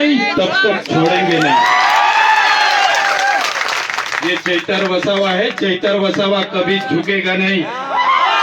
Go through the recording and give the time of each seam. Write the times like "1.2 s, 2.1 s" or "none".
none